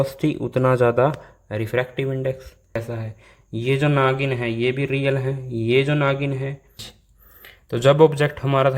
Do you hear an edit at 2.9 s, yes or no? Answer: yes